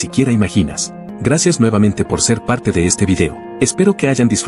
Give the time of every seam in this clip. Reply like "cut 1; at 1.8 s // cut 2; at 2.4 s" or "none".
cut 1; at 1.0 s